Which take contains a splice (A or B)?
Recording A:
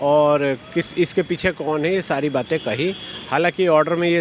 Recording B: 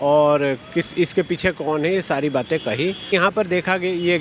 B